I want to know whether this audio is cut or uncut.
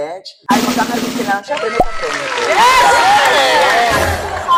uncut